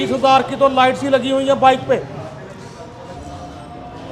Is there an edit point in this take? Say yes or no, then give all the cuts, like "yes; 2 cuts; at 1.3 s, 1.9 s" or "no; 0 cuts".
yes; 1 cut; at 3.2 s